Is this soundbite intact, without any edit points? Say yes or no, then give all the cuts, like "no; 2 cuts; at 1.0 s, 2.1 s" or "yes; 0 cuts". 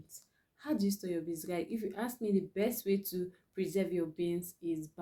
yes; 0 cuts